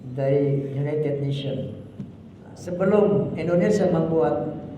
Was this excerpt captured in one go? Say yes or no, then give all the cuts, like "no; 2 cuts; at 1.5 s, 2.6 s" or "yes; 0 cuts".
no; 1 cut; at 2.5 s